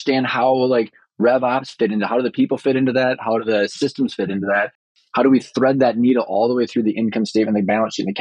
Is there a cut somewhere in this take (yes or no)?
no